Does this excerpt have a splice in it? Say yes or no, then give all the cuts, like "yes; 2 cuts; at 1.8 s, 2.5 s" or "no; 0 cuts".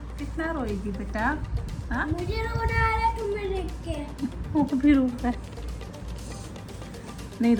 no; 0 cuts